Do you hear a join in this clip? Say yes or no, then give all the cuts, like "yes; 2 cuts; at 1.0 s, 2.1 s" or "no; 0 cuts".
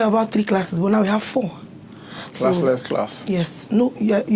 no; 0 cuts